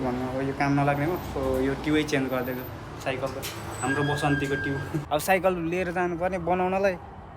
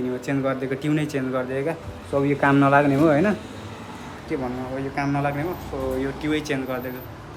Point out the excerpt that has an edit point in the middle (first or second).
first